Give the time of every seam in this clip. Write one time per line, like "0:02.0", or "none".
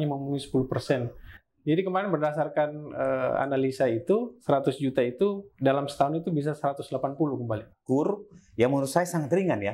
0:01.4
0:07.7